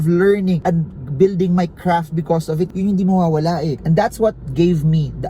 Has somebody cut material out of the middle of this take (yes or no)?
yes